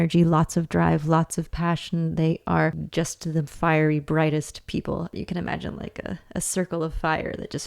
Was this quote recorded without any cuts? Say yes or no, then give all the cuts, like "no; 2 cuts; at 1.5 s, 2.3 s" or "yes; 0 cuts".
no; 1 cut; at 5.1 s